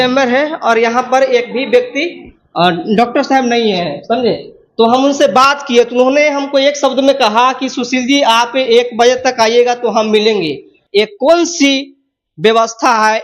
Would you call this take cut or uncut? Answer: cut